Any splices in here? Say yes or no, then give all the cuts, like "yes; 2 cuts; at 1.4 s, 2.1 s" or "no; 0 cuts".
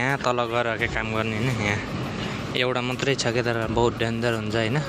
no; 0 cuts